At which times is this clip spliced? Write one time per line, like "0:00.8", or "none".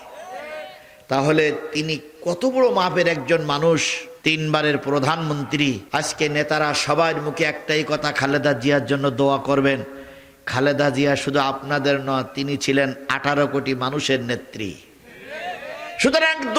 none